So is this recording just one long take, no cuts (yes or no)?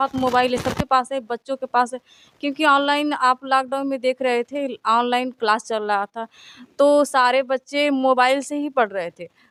yes